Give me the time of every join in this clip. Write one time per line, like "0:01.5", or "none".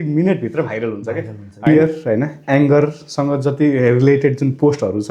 0:01.7